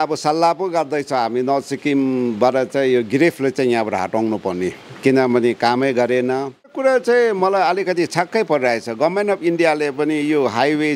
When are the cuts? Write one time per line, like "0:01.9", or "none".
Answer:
0:06.7